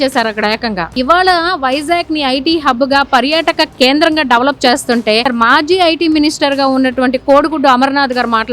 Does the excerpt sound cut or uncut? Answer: cut